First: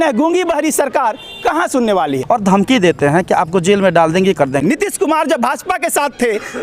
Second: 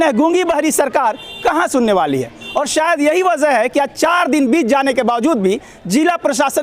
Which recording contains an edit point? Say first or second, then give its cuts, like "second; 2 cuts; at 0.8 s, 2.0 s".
first; 2 cuts; at 2.2 s, 4.6 s